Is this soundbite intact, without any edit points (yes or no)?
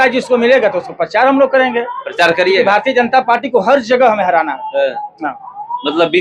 yes